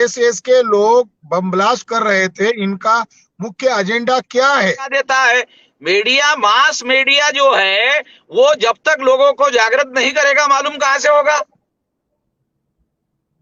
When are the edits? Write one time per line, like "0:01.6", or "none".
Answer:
0:04.9